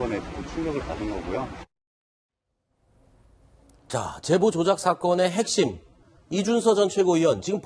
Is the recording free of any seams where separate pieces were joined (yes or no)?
yes